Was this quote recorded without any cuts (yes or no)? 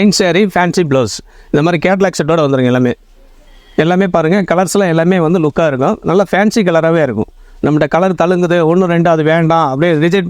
yes